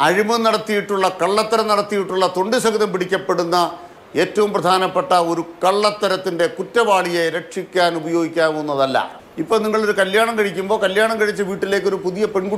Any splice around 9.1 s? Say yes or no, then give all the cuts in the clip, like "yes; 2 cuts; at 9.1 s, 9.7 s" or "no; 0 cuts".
yes; 1 cut; at 9.1 s